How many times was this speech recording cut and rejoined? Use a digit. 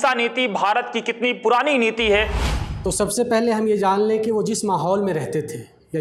1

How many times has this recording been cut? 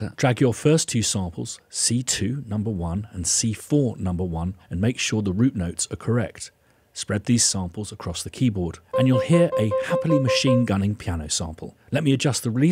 1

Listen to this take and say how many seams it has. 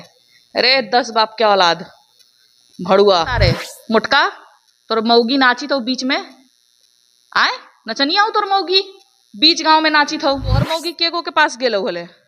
2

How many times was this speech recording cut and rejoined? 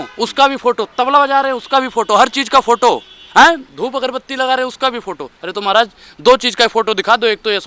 0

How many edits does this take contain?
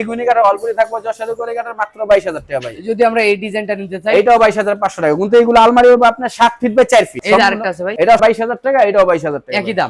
0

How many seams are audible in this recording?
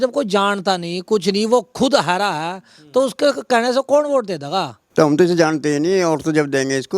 1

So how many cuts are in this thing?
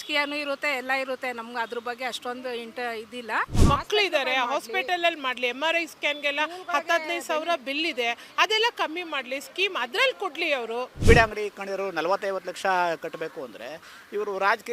2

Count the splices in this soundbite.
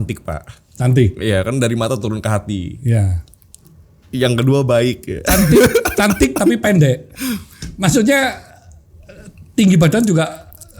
0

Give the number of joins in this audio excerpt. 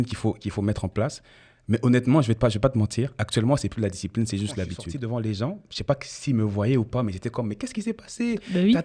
1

